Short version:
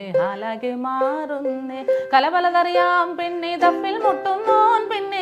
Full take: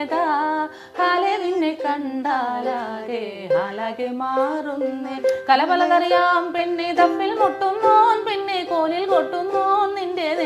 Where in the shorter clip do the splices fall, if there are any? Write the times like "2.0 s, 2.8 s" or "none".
none